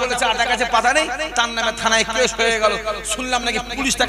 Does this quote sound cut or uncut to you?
uncut